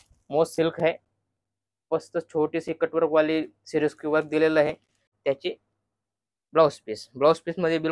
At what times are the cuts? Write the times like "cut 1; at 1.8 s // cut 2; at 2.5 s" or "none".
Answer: cut 1; at 5.1 s